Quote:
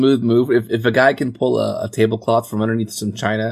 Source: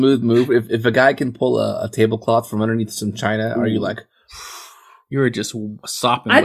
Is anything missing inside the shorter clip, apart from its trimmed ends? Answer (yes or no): no